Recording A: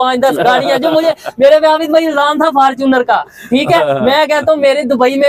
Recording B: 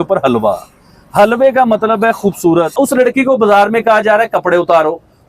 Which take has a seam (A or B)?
B